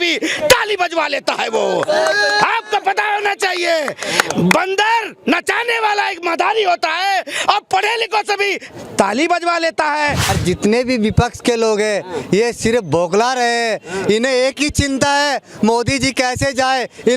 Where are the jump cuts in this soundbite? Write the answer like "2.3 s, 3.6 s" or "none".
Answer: 10.3 s